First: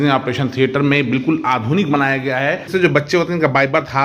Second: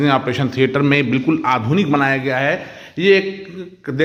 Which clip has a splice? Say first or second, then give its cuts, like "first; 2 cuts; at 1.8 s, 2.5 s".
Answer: first; 1 cut; at 2.7 s